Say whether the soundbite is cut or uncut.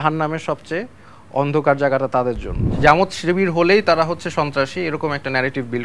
cut